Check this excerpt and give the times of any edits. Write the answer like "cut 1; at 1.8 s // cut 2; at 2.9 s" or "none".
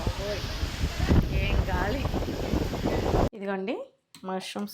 cut 1; at 3.3 s